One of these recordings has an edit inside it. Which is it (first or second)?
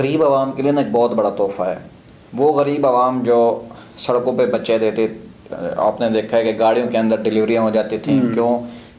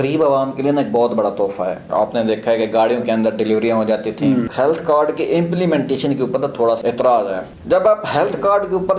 second